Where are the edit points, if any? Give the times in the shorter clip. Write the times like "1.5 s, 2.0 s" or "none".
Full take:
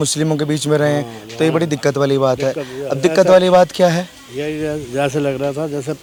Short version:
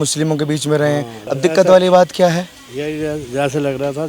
1.2 s